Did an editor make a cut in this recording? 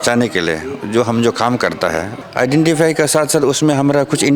yes; 1 cut; at 2.1 s

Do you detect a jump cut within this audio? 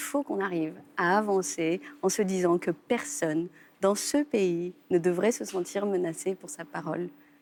no; 0 cuts

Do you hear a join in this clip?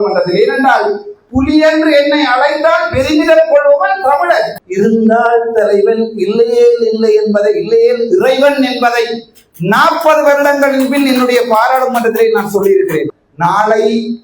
yes; 2 cuts; at 4.6 s, 13.2 s

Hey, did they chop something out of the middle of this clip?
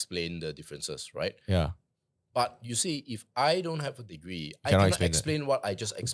no; 0 cuts

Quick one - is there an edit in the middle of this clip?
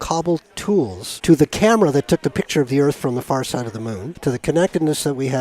yes; 2 cuts; at 1.1 s, 4.1 s

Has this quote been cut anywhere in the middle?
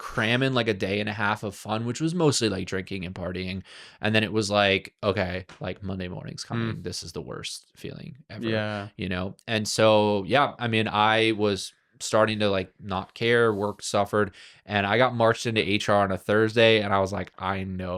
no; 0 cuts

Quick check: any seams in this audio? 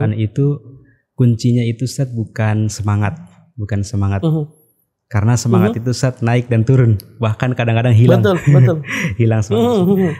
no; 0 cuts

